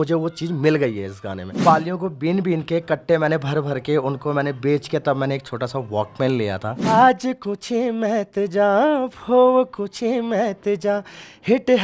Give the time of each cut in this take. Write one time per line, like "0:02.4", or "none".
0:01.6
0:06.9